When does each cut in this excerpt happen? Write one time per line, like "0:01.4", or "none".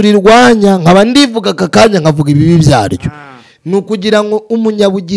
none